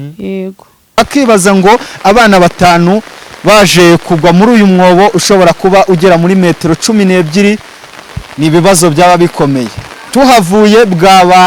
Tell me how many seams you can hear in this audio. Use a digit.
1